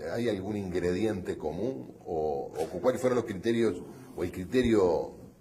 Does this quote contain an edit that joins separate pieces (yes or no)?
yes